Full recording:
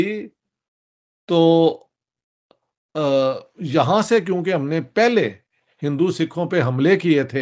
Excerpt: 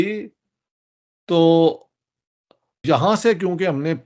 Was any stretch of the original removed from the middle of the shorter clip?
yes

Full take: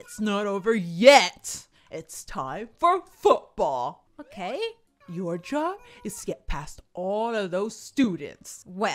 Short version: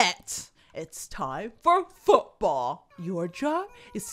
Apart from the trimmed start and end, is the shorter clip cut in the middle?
yes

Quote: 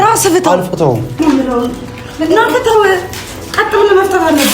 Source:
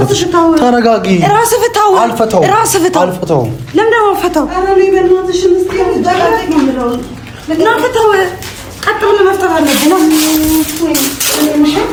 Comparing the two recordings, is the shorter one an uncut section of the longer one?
no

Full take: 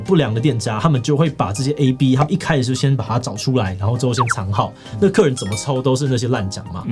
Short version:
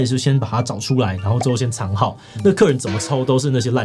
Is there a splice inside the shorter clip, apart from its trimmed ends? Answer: no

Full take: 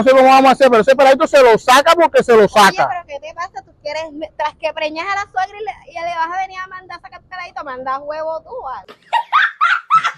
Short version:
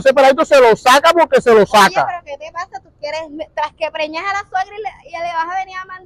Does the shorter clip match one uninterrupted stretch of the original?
yes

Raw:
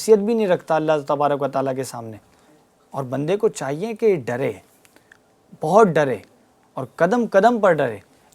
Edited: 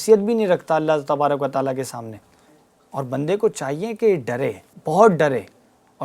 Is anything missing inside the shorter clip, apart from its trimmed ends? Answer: yes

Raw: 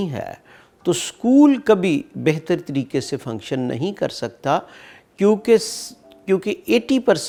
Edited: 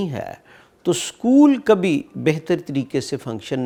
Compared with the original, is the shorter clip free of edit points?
yes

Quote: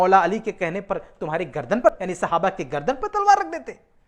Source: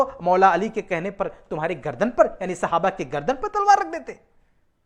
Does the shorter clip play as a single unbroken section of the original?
no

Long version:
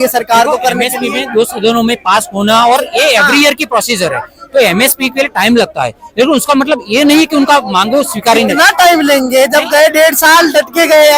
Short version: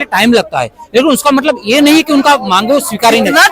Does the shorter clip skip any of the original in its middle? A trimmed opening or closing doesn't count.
no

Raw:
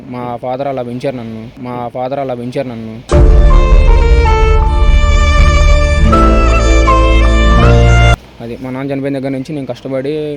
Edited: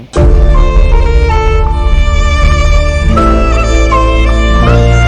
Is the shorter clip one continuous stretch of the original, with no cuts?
yes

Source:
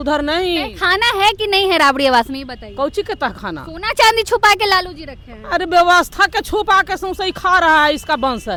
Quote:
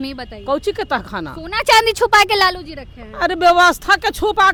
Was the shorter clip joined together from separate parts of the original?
no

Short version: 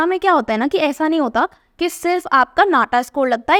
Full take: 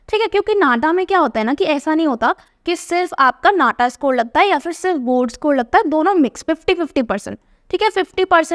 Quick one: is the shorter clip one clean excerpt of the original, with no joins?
yes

